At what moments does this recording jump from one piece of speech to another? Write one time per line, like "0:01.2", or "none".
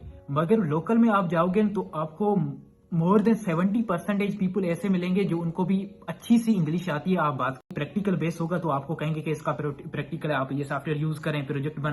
0:07.7